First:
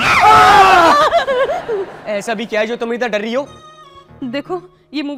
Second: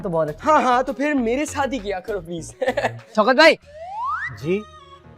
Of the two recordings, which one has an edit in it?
second; 1 cut; at 3.0 s

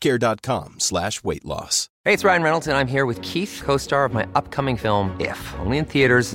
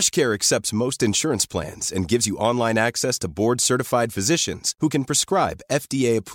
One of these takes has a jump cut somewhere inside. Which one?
first; 1 cut; at 1.8 s

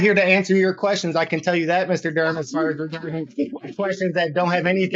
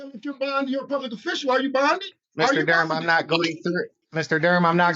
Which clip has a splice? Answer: second; 2 cuts; at 2.2 s, 4.0 s

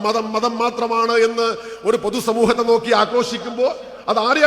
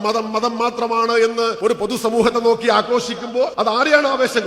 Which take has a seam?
second; 2 cuts; at 1.5 s, 3.5 s

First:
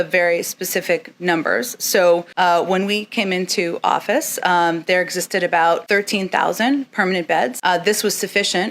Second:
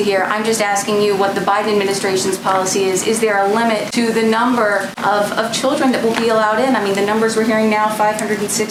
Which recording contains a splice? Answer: first; 1 cut; at 7.6 s

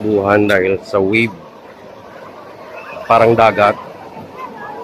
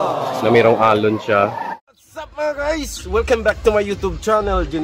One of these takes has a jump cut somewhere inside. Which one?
second; 1 cut; at 1.8 s

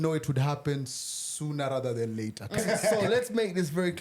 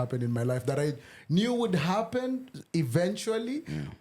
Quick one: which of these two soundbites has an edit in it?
first; 1 cut; at 2.6 s

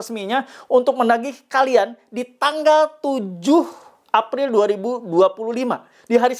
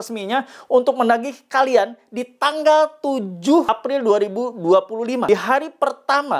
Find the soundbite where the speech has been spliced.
second; 2 cuts; at 3.7 s, 5.2 s

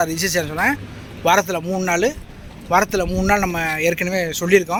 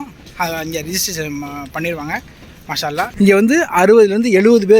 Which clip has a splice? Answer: second; 1 cut; at 3.1 s

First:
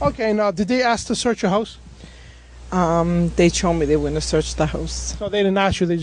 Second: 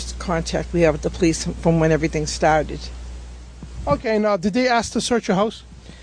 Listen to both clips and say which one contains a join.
second; 1 cut; at 2.8 s

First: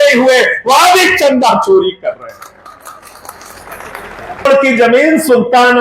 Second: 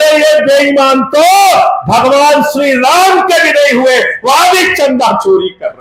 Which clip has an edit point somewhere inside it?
first; 1 cut; at 4.5 s

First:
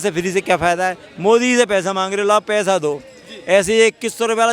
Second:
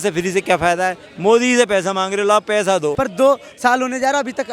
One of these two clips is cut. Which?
second; 1 cut; at 3.0 s

